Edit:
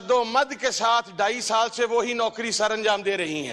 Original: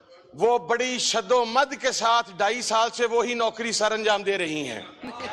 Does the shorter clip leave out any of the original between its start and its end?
no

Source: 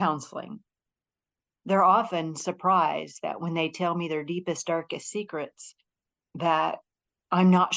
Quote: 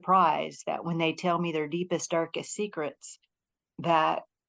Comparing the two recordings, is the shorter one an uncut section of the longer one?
yes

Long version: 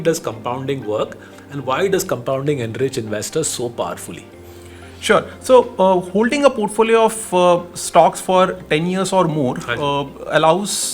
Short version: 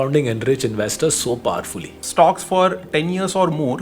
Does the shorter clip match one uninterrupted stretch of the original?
no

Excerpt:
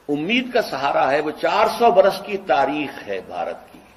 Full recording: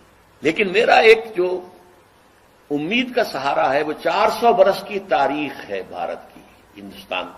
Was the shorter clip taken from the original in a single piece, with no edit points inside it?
yes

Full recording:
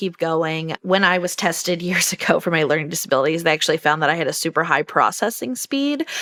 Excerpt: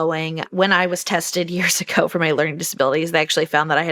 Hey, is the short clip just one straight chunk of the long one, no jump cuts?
yes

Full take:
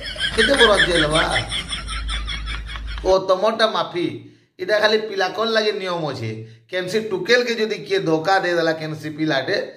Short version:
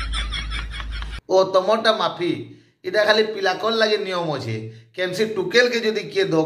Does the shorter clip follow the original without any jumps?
yes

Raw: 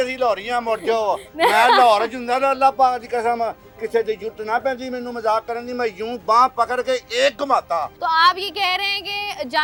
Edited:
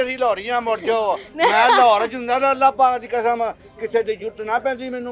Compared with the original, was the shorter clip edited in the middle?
no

